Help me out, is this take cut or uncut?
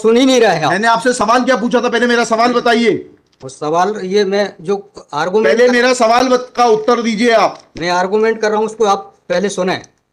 uncut